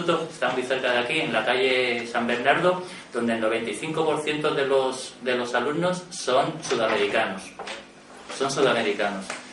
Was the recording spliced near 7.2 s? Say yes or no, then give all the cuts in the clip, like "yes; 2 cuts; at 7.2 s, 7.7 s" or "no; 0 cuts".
no; 1 cut; at 1.6 s